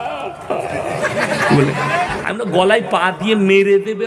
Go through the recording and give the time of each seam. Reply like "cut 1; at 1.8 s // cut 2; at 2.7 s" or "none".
none